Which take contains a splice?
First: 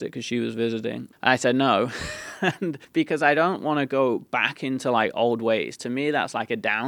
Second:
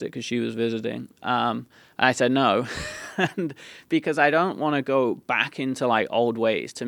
first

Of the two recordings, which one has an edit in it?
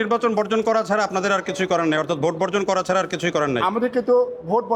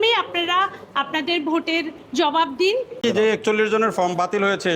second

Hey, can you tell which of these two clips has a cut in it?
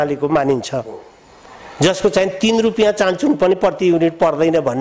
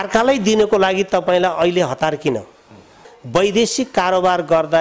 second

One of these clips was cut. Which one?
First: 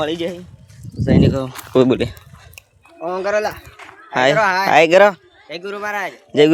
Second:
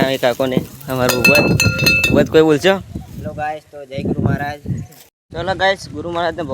second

